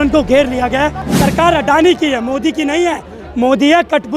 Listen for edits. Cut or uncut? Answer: cut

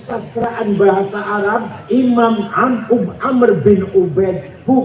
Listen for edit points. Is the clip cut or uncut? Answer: cut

